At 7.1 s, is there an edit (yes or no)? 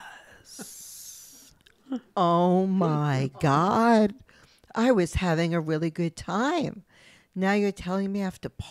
no